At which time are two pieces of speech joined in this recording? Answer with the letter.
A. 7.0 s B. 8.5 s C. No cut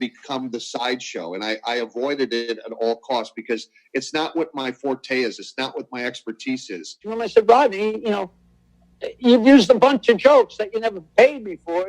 A